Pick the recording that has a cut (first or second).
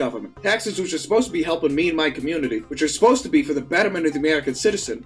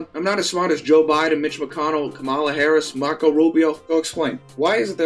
second